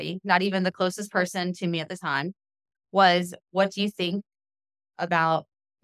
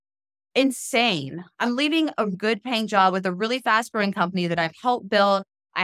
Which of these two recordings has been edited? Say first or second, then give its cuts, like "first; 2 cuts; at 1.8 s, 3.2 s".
second; 1 cut; at 2.4 s